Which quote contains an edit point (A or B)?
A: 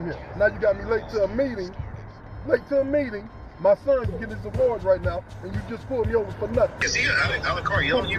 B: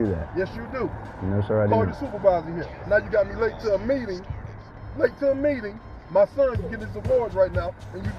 A